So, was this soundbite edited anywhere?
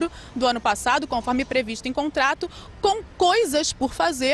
yes; 1 cut; at 3.2 s

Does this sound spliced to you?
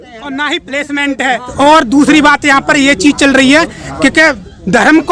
yes; 1 cut; at 1.4 s

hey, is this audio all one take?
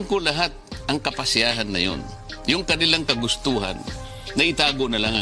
yes; 0 cuts

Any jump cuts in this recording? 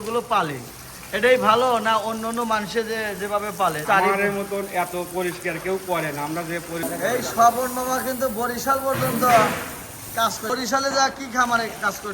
yes; 3 cuts; at 3.8 s, 6.8 s, 10.5 s

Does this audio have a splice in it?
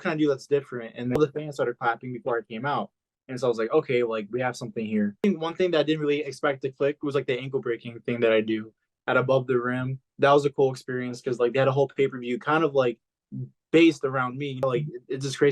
yes; 4 cuts; at 1.2 s, 5.2 s, 8.8 s, 14.6 s

